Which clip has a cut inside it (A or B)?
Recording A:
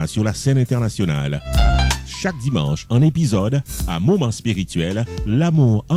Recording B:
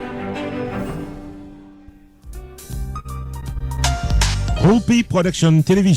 B